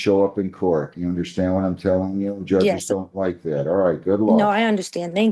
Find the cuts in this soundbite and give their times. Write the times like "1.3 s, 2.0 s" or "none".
none